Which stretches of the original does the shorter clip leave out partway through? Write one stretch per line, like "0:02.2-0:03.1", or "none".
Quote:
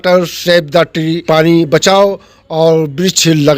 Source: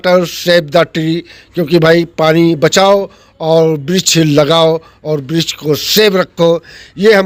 0:01.2-0:02.1